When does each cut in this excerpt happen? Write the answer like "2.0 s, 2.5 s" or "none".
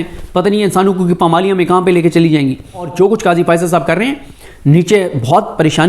2.9 s